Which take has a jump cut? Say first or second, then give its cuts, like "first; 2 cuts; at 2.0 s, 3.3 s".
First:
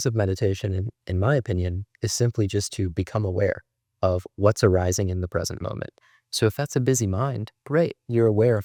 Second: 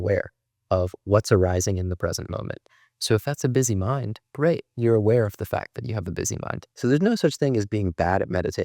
second; 1 cut; at 6.7 s